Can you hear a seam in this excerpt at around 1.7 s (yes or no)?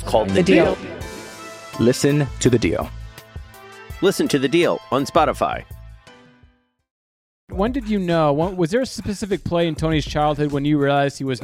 no